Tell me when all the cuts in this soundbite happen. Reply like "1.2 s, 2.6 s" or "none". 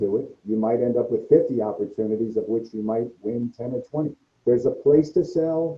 4.3 s